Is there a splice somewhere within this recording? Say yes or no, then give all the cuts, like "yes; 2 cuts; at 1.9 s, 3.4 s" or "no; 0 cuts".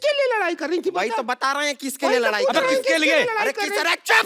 yes; 1 cut; at 2.3 s